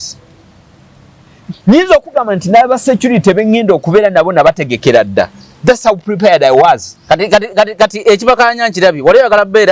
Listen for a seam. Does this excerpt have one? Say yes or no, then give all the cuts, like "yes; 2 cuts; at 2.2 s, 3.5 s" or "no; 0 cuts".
no; 0 cuts